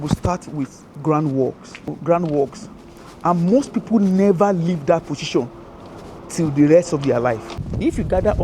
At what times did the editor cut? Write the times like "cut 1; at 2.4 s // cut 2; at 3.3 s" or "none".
cut 1; at 1.9 s // cut 2; at 7.5 s